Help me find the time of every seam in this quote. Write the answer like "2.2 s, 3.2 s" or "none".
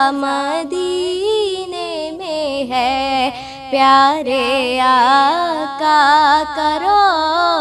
none